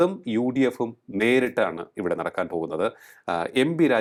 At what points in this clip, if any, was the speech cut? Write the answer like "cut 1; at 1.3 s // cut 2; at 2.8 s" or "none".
none